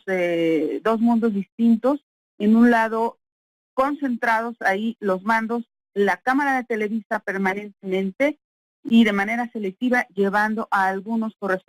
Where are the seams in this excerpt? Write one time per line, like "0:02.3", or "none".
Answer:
0:03.2